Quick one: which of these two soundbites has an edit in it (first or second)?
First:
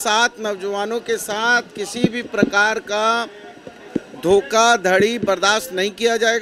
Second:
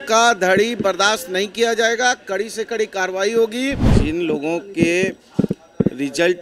second